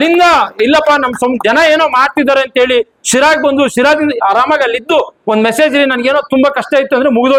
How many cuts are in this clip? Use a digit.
0